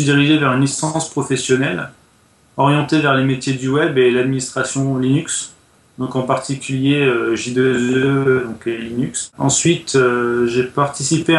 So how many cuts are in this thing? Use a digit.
1